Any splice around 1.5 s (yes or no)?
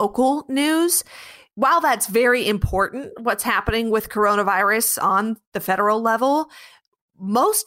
yes